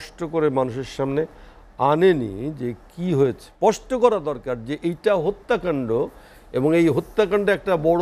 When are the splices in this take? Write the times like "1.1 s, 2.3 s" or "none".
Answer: 3.4 s